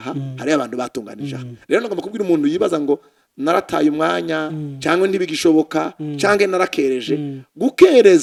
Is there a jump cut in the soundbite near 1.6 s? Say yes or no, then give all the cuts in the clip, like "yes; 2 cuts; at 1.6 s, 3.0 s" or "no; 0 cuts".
no; 0 cuts